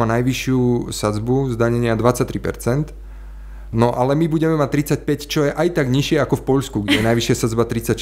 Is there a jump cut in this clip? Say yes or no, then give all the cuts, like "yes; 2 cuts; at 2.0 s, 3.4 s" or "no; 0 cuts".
no; 0 cuts